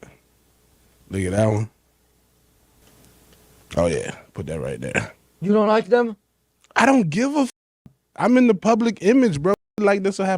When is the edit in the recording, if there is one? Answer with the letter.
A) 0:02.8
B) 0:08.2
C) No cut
A